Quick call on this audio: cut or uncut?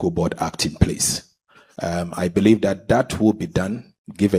uncut